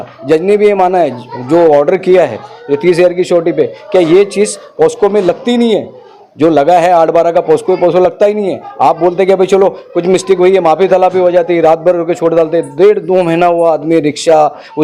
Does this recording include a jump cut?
no; 0 cuts

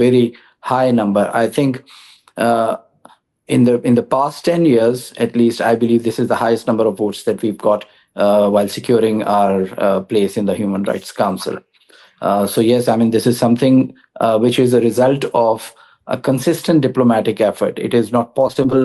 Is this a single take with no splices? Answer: yes; 0 cuts

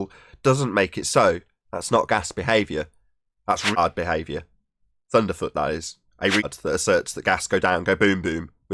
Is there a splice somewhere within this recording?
yes; 2 cuts; at 3.8 s, 6.5 s

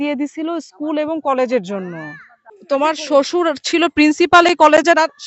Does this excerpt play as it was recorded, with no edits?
no; 1 cut; at 2.6 s

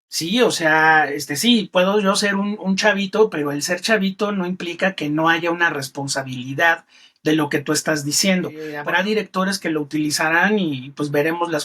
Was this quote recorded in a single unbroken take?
no; 1 cut; at 8.7 s

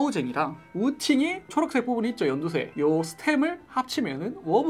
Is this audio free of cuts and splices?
yes; 0 cuts

